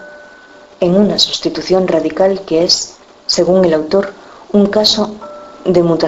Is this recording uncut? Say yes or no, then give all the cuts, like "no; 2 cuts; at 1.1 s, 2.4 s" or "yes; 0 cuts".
yes; 0 cuts